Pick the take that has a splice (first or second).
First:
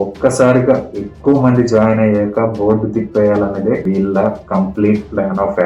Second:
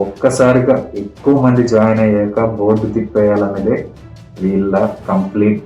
first